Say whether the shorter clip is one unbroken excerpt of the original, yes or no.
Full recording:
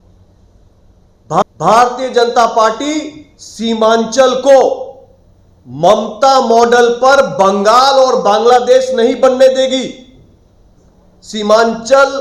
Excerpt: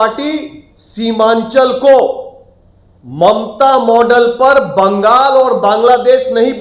yes